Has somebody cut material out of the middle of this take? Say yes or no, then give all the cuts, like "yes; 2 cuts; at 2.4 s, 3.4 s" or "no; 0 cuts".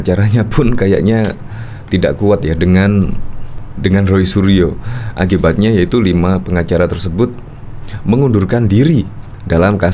no; 0 cuts